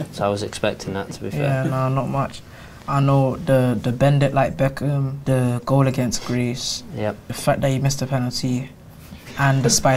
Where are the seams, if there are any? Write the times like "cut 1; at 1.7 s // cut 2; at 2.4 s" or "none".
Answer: cut 1; at 5.1 s // cut 2; at 7.3 s